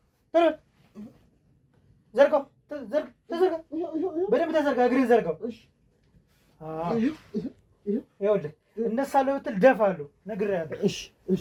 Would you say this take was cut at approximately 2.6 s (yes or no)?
no